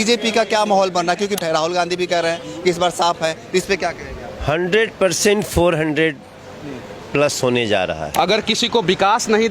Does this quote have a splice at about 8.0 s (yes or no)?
yes